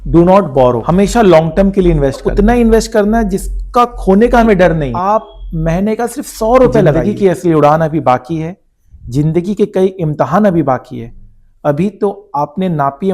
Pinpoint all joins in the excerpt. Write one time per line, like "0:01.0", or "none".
0:00.8
0:02.2
0:04.9
0:07.0